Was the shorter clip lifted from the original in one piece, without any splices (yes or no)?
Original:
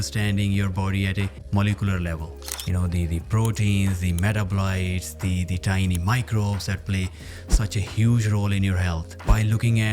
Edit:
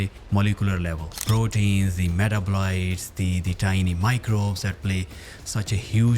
no